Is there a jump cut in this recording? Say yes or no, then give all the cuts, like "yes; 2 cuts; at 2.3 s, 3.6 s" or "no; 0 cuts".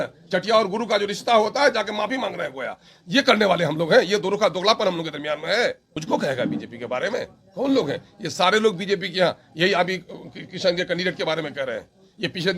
yes; 1 cut; at 5.9 s